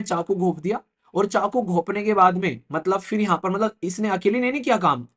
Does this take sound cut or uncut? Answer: uncut